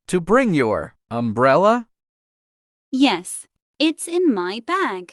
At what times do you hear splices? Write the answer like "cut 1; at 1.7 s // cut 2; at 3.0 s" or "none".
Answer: none